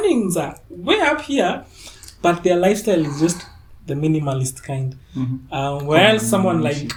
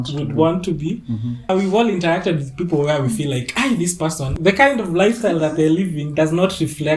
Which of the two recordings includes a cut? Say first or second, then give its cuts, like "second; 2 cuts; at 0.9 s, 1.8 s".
second; 2 cuts; at 1.5 s, 4.4 s